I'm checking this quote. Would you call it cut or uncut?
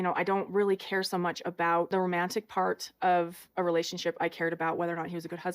cut